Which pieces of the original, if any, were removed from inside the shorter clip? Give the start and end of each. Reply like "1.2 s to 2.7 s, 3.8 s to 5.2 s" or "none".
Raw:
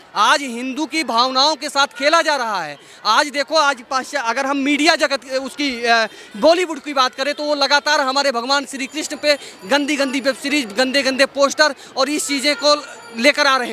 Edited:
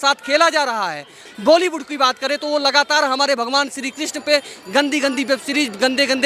2.9 s to 6.2 s

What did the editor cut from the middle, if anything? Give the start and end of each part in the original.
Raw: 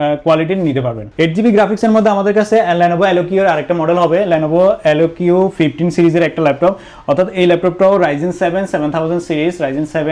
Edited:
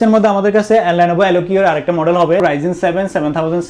4.2 s to 8.0 s

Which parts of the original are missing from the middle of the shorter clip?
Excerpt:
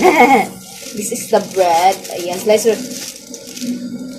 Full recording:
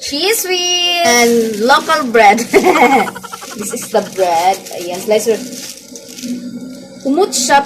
none

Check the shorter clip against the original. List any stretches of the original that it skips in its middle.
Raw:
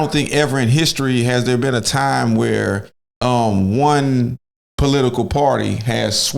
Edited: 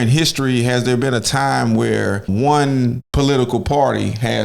2.9 s to 3.7 s, 4.4 s to 4.7 s

